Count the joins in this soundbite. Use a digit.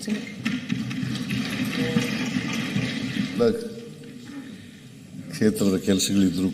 1